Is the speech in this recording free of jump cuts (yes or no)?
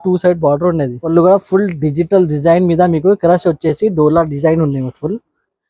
no